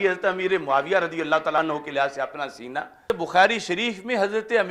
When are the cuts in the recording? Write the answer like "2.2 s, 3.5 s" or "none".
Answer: 1.6 s, 3.1 s